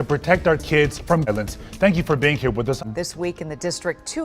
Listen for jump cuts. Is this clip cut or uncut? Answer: cut